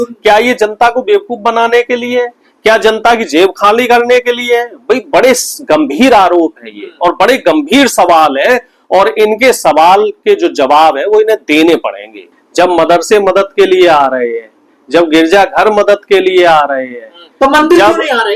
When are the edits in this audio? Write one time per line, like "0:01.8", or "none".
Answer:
0:12.2